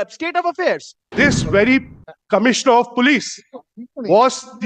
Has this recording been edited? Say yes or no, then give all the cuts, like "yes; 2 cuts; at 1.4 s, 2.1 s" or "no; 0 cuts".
yes; 1 cut; at 1.1 s